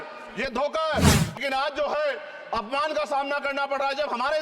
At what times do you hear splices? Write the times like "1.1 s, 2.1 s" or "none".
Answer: 1.4 s

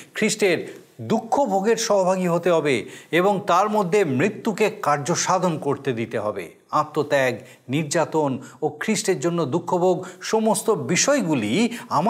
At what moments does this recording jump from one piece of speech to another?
none

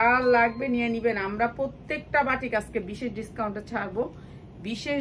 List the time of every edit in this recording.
none

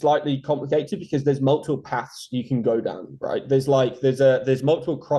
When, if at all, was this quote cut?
none

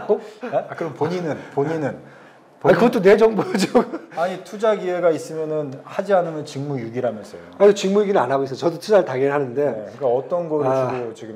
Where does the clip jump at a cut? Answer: none

